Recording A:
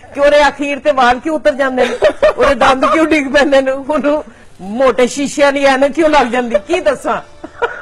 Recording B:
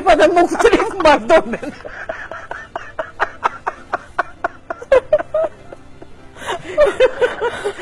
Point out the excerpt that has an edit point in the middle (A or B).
A